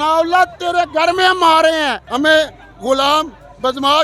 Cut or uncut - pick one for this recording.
cut